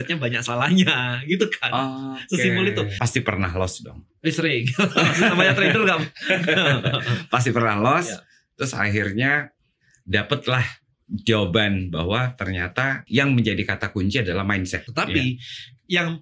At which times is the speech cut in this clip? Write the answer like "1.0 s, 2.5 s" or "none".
2.9 s, 14.8 s